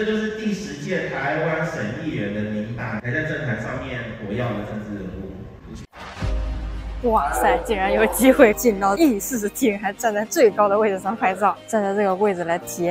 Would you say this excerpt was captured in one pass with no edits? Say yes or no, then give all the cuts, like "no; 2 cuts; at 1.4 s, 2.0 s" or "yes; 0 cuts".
no; 3 cuts; at 5.9 s, 8.9 s, 11.6 s